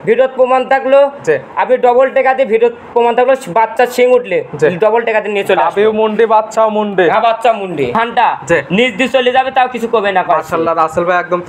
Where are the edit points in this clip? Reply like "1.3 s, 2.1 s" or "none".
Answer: 7.9 s